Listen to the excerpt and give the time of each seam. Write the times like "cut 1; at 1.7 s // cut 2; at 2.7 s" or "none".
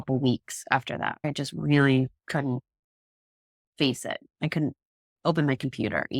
cut 1; at 1.2 s